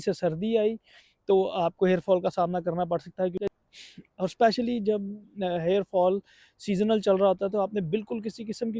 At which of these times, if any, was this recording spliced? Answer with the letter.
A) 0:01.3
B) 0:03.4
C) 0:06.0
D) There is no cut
B